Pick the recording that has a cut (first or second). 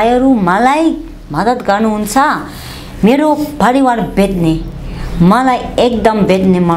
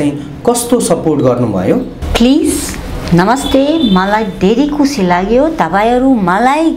second